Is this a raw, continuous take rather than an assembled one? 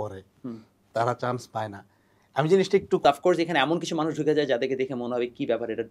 no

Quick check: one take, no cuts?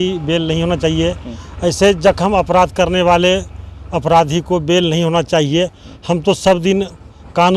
yes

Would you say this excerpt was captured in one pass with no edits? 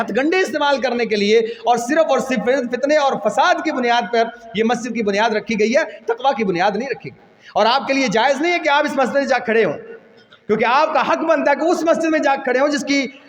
yes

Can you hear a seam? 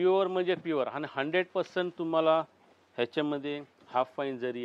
no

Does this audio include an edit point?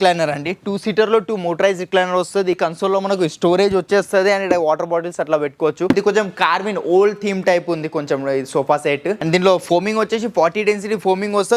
yes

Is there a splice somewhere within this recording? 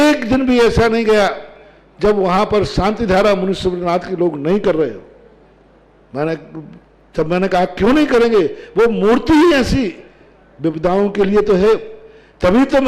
no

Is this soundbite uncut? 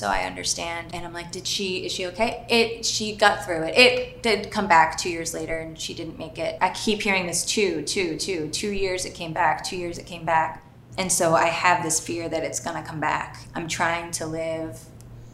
no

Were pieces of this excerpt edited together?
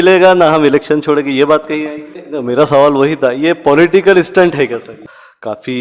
yes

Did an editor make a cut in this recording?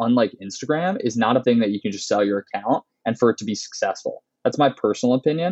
yes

